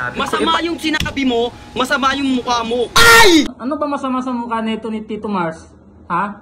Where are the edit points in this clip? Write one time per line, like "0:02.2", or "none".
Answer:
0:03.5